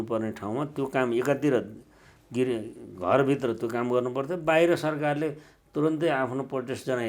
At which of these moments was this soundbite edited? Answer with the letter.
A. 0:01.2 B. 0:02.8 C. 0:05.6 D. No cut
D